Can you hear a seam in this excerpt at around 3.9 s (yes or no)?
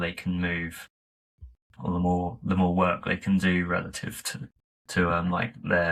no